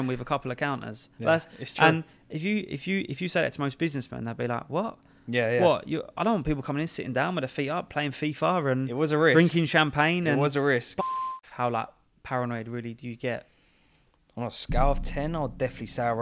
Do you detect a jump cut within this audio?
yes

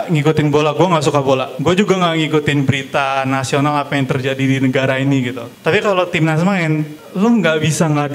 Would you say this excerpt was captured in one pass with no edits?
no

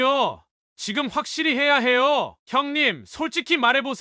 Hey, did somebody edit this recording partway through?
yes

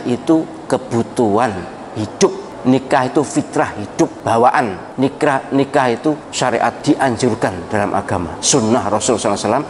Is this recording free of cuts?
no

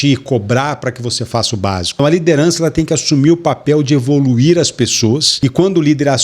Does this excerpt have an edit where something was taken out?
yes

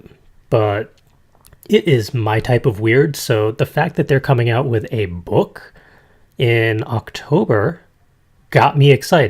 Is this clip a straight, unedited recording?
no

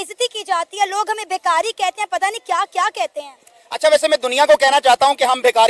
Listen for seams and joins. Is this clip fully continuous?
yes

